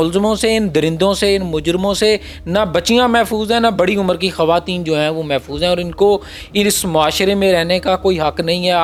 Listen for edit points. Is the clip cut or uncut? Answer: uncut